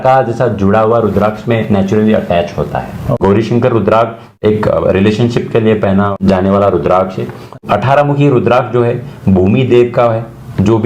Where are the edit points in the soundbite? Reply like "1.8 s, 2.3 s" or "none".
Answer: 3.0 s, 4.4 s, 6.2 s, 7.6 s

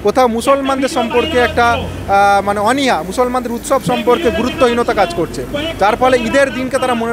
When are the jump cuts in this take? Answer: none

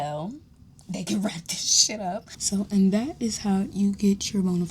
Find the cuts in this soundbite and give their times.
2.3 s

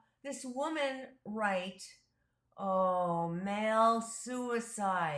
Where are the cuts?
none

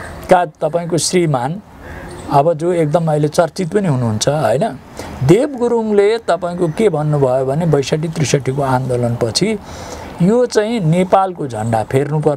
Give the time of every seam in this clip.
none

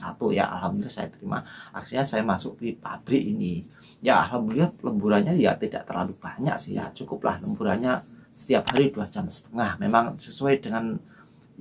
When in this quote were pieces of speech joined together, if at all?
none

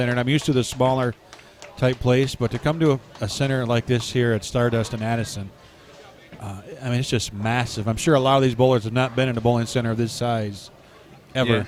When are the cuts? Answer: none

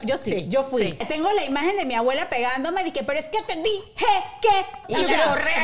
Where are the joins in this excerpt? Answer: 1.0 s, 4.8 s

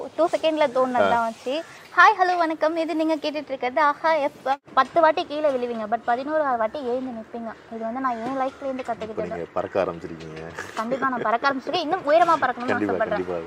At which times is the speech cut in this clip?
4.6 s

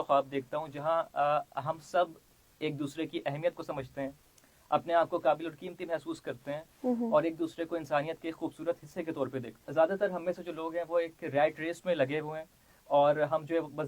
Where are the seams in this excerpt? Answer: 9.5 s

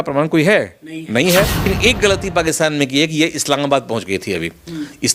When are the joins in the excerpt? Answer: 1.7 s

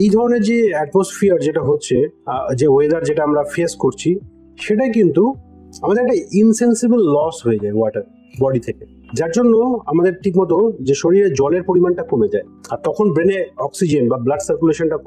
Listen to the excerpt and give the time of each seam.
none

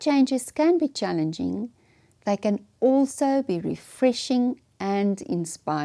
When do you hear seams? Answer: none

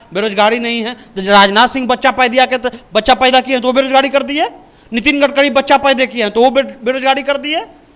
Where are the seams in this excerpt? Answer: none

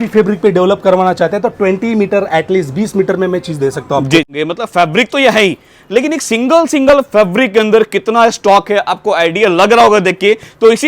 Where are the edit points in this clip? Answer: 4.3 s

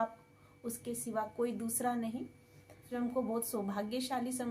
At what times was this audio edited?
2.9 s

